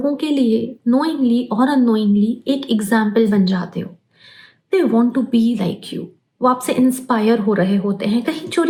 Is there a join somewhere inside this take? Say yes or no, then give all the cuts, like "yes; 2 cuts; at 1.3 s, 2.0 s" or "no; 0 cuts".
no; 0 cuts